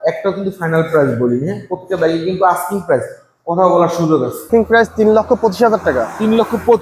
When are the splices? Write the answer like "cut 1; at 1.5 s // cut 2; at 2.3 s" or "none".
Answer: cut 1; at 4.5 s